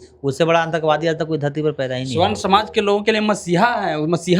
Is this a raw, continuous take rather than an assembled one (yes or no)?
yes